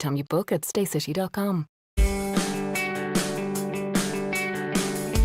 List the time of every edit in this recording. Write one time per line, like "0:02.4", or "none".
0:01.8